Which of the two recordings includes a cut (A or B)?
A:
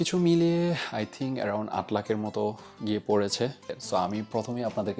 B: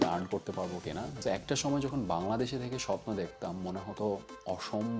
B